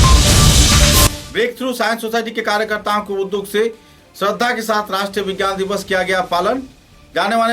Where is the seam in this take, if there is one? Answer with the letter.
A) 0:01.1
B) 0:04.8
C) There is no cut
A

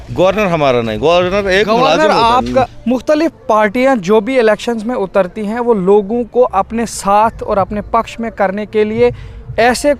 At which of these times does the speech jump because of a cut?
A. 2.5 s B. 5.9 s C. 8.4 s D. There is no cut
A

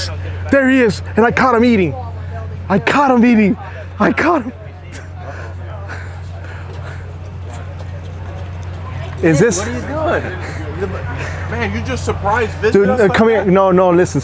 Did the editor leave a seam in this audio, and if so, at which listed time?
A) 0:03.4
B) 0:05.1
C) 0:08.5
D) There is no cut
D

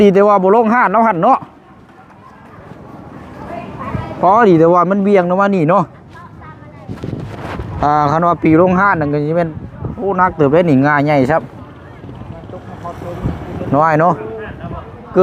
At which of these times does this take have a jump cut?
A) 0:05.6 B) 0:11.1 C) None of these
C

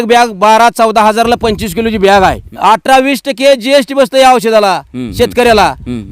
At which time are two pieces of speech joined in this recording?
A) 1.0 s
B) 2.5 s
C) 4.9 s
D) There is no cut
B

